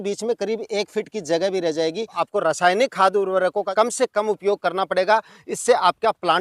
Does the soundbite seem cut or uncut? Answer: cut